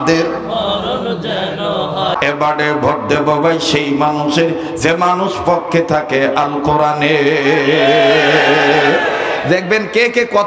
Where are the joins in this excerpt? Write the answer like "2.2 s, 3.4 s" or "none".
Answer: 2.2 s